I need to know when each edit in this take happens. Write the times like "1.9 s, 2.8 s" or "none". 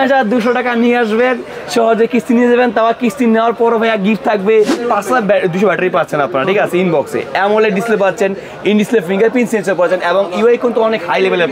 4.8 s